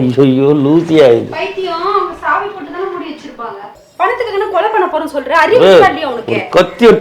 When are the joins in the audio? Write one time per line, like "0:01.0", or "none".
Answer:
0:03.8